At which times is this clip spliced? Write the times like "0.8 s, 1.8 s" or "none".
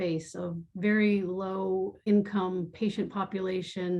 2.0 s

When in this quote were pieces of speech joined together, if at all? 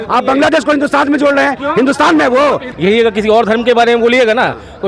2.7 s

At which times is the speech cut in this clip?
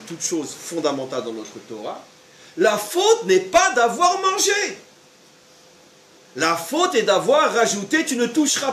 none

